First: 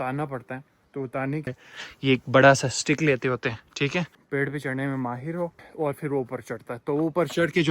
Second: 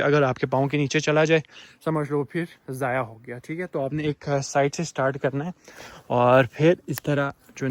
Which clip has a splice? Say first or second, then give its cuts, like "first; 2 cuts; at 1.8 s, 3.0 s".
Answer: first; 3 cuts; at 1.5 s, 4.2 s, 5.7 s